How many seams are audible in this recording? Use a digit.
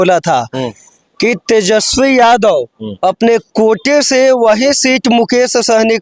0